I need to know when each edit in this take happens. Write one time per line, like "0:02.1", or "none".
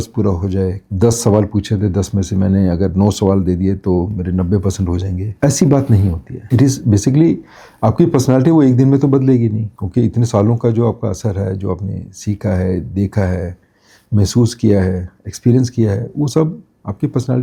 none

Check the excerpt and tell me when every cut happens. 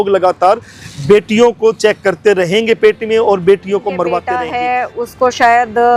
0:04.4

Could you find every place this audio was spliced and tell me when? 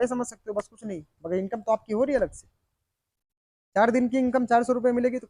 none

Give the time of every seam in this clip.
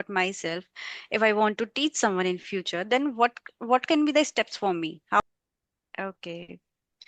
0:05.2

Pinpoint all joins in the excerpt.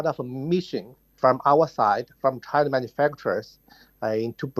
none

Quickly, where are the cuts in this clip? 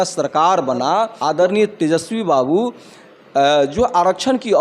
0:01.1

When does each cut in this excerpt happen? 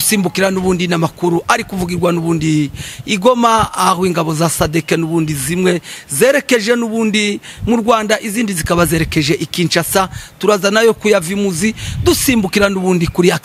none

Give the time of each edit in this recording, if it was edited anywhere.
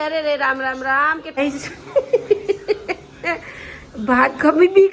0:01.2

